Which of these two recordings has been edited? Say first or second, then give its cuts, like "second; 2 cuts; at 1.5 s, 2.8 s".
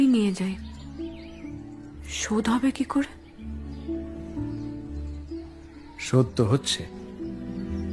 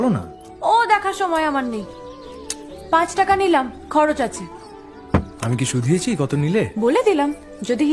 first; 1 cut; at 5.3 s